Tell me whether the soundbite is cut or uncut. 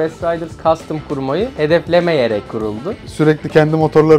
cut